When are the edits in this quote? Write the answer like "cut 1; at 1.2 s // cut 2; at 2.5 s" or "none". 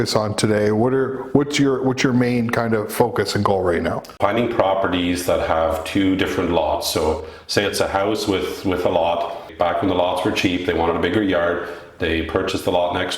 cut 1; at 4.2 s // cut 2; at 9.5 s